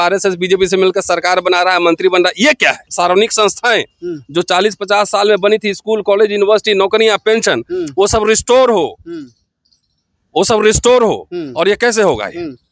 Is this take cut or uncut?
cut